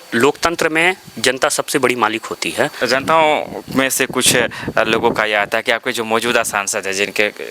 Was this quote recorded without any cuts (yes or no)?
no